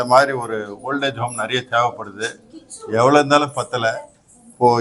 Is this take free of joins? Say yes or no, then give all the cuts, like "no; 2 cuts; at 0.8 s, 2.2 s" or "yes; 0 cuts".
yes; 0 cuts